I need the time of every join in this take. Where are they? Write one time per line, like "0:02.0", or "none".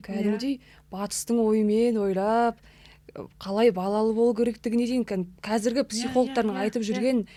none